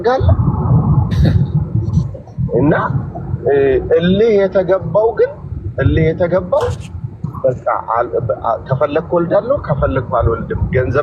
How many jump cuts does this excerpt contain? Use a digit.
0